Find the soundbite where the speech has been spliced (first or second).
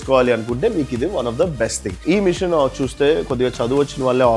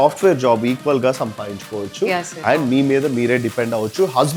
first